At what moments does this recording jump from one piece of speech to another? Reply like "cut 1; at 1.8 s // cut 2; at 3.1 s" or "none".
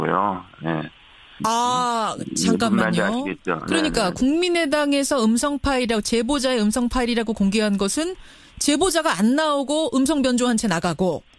none